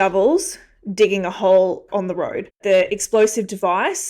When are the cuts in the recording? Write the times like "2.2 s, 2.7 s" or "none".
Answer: 2.6 s

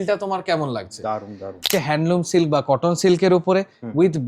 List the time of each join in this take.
1.7 s

